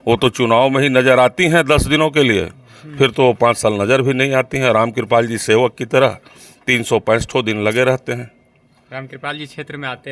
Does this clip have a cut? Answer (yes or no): no